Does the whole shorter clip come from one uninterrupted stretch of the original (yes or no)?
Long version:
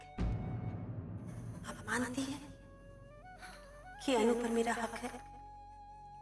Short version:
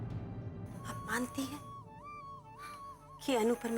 no